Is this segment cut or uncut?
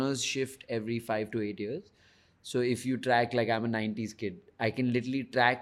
uncut